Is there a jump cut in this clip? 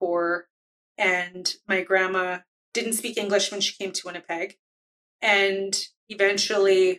no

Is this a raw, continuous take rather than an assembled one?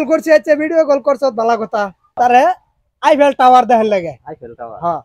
yes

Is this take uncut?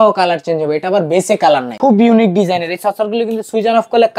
no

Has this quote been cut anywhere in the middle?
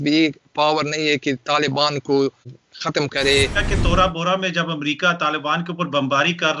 yes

